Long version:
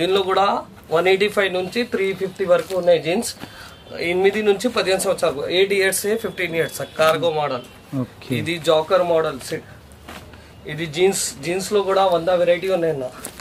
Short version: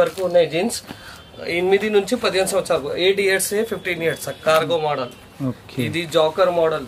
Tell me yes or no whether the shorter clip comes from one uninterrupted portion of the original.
yes